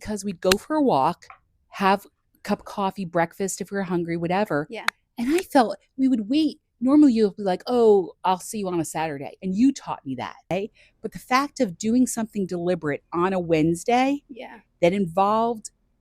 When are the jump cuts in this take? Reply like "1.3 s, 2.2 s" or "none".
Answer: 10.5 s

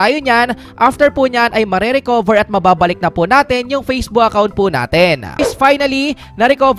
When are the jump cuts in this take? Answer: 5.4 s

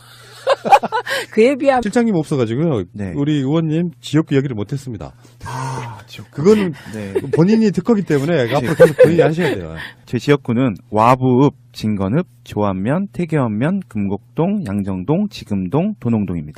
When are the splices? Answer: 5.1 s

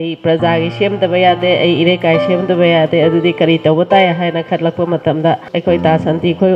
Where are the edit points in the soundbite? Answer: 5.5 s

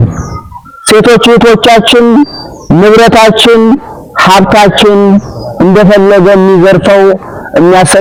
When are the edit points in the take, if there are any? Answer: none

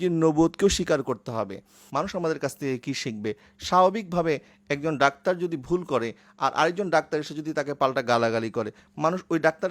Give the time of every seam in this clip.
1.7 s

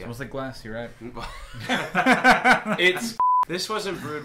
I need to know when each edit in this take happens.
3.2 s

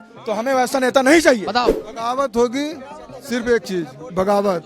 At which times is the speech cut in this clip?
1.6 s

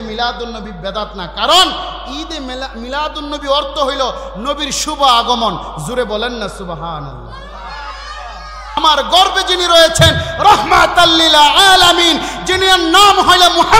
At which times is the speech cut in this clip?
8.8 s

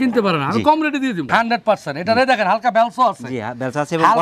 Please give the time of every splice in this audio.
1.3 s

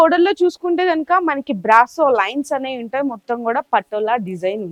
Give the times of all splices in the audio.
none

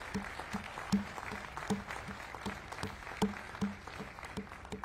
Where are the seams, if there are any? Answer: none

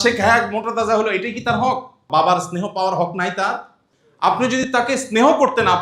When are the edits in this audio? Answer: 1.9 s

